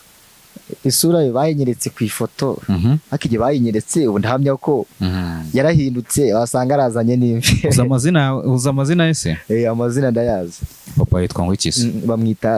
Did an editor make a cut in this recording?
no; 0 cuts

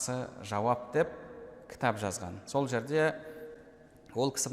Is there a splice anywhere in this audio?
no; 0 cuts

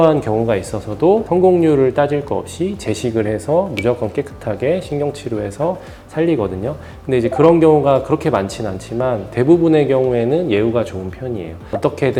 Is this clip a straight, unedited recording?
yes; 0 cuts

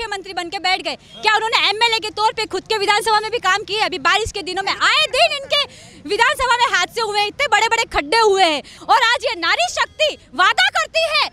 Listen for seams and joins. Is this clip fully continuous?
no; 1 cut; at 8.7 s

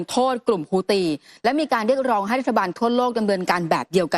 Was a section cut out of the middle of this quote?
no; 0 cuts

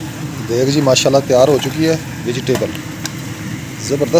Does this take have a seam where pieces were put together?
no; 0 cuts

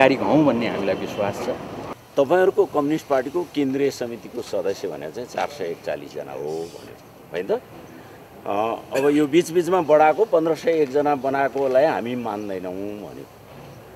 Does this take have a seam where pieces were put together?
yes; 1 cut; at 1.9 s

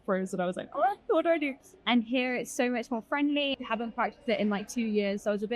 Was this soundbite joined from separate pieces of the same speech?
yes; 2 cuts; at 1.6 s, 3.6 s

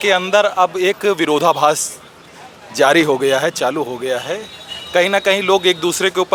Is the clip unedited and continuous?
yes; 0 cuts

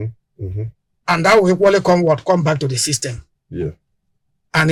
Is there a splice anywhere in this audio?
no; 0 cuts

